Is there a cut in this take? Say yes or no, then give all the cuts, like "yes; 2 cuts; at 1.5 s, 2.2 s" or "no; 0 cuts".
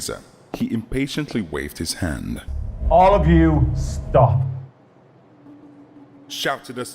yes; 1 cut; at 2.5 s